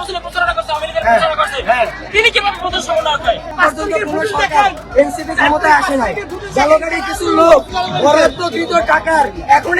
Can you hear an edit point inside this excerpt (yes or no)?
yes